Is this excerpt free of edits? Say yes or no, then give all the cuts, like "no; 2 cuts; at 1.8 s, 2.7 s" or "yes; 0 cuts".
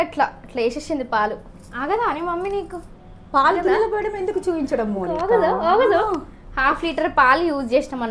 yes; 0 cuts